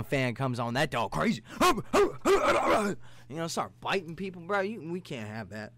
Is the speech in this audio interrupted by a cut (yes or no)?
no